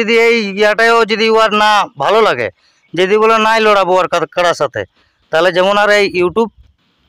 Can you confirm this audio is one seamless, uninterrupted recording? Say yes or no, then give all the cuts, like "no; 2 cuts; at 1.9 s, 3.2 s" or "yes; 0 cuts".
yes; 0 cuts